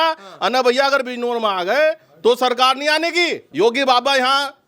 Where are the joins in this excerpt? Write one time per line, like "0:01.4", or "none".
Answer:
0:03.4

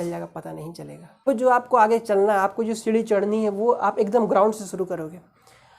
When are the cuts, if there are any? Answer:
0:01.3

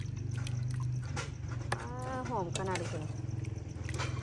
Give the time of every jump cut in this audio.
none

